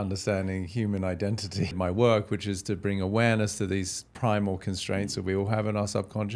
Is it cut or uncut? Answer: cut